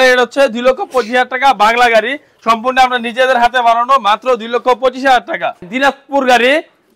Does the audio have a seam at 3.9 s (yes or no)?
no